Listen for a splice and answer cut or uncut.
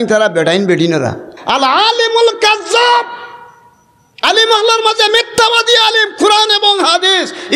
cut